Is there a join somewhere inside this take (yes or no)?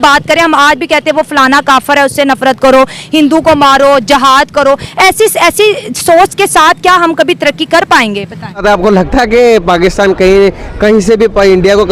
yes